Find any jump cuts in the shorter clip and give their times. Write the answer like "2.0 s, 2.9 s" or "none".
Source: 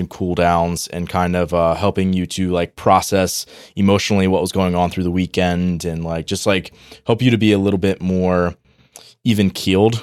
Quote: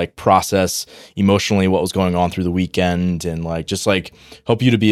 none